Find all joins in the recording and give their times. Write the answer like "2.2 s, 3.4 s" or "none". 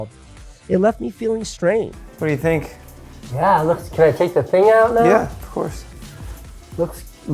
none